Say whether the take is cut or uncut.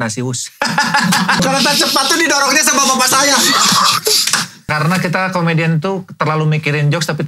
cut